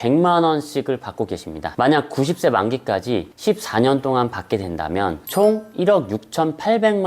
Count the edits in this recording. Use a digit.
1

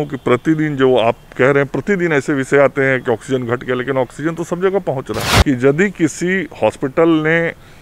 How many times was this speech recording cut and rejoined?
1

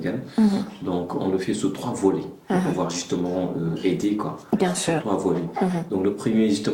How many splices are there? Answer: 0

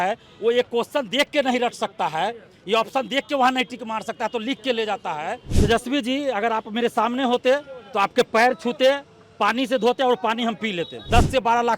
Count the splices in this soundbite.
2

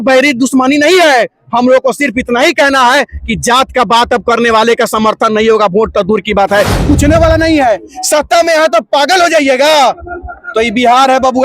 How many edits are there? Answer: 1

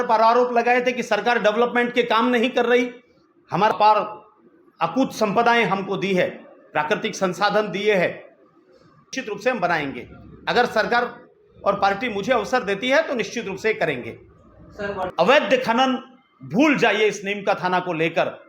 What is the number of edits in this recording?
3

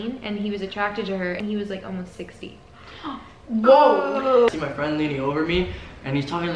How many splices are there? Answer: 2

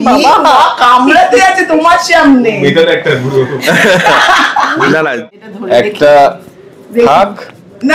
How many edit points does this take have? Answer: 1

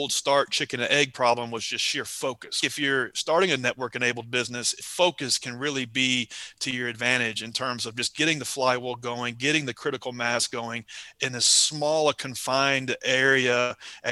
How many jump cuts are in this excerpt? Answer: 2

